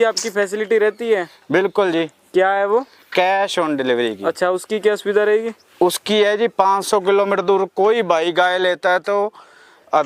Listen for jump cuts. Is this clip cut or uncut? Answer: uncut